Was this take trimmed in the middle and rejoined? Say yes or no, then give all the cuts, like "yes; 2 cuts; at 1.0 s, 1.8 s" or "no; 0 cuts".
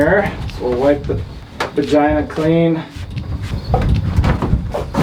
yes; 1 cut; at 3.5 s